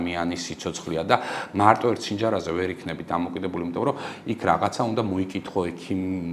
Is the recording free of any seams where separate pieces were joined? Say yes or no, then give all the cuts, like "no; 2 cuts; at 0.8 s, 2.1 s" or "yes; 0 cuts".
yes; 0 cuts